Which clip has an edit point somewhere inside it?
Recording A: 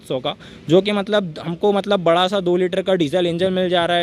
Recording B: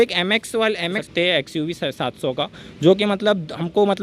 B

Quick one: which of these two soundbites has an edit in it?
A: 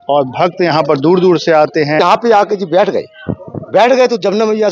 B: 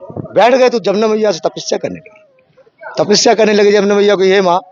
A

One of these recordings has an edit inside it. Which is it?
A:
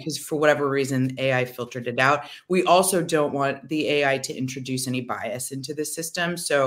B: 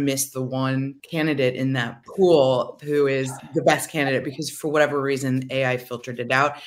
B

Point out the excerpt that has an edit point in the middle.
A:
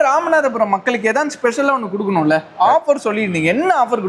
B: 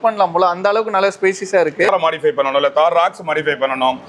B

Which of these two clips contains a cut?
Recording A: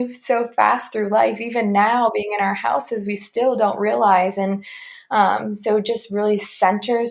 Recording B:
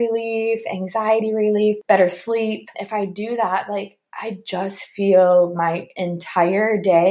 B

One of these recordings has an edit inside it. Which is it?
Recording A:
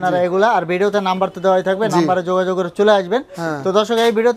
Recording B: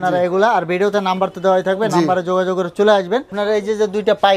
B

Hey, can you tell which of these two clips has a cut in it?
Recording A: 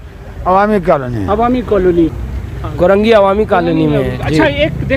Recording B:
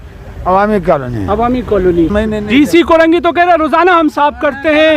B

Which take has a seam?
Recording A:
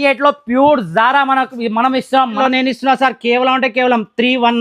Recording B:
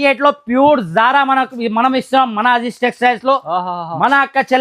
A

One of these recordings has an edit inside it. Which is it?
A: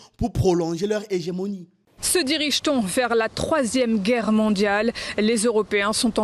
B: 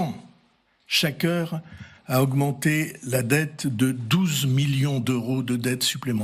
A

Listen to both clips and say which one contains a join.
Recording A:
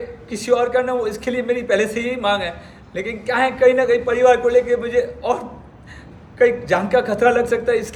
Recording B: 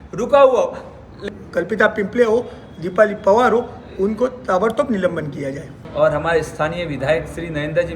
B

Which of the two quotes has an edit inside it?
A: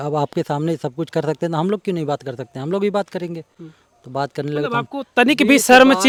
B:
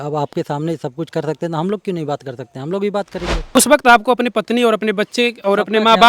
B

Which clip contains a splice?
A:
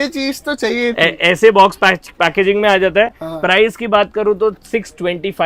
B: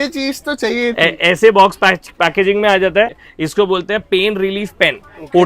B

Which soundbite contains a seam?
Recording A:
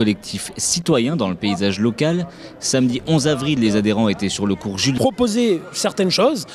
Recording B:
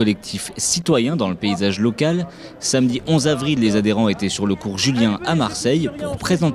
B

